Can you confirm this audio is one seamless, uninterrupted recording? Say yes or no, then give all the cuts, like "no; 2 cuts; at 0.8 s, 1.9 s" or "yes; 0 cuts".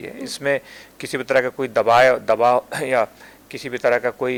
yes; 0 cuts